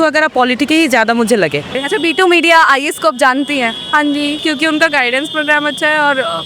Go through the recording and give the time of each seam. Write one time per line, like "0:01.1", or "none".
0:01.8
0:04.4